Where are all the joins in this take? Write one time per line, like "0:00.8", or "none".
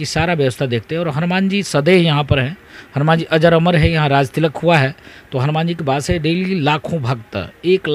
none